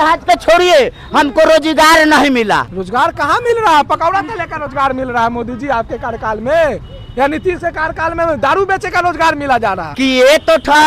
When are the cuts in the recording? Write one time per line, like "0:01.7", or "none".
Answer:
0:02.7
0:09.8